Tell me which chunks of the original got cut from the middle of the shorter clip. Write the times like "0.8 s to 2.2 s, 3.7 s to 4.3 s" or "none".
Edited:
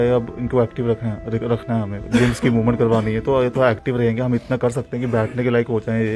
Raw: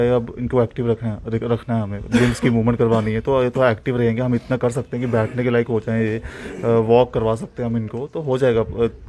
none